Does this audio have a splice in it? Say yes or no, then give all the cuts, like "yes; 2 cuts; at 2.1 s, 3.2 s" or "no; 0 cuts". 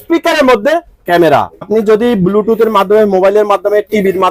yes; 1 cut; at 1.7 s